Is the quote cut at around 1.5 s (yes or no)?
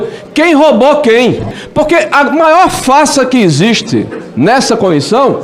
yes